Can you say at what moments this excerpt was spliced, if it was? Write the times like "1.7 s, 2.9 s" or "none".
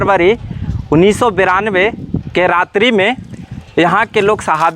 none

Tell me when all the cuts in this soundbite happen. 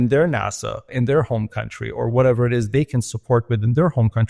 0.9 s

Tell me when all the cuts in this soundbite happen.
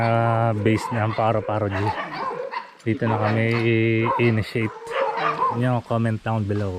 5.6 s

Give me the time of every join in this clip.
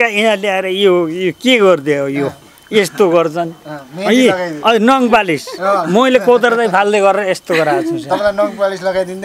none

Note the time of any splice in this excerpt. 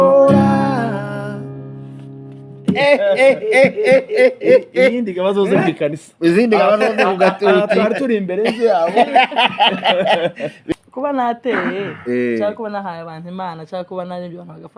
10.6 s

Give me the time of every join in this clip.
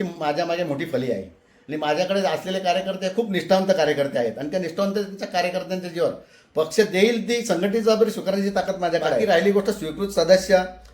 9.2 s

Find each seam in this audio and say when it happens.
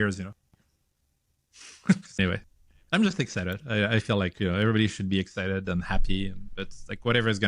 2.2 s

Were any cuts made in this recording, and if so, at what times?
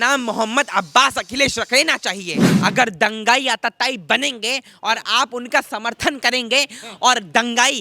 2.4 s

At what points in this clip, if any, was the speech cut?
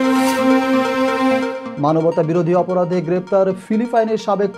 1.6 s

